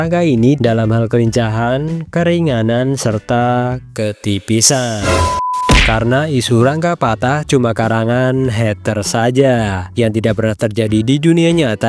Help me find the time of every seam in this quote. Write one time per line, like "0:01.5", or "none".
0:05.6